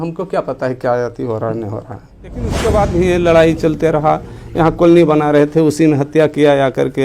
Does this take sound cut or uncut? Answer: cut